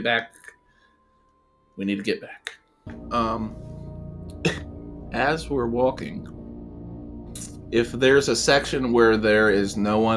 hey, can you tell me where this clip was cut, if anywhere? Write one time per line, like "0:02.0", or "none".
0:02.9